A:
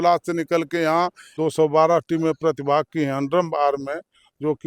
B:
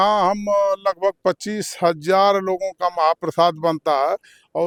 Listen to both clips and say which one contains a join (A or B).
A